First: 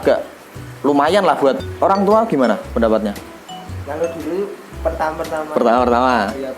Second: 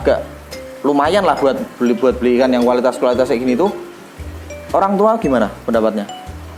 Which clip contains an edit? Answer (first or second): first